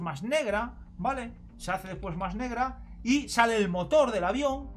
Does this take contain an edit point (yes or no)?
no